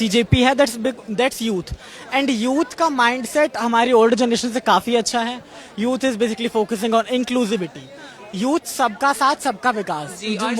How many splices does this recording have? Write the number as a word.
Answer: zero